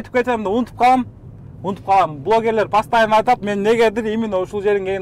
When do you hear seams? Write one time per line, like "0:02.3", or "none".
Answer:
none